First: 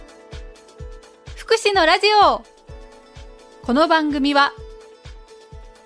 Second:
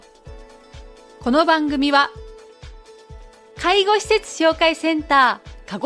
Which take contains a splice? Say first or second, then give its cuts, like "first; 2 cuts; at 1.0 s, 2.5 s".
first; 1 cut; at 1.0 s